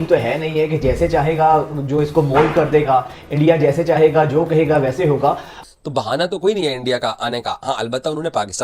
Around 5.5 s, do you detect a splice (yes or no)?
yes